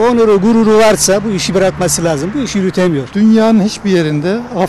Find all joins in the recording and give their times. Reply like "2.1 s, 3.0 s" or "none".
3.1 s